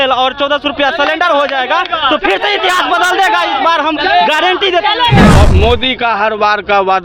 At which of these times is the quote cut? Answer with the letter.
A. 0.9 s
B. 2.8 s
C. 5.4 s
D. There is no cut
C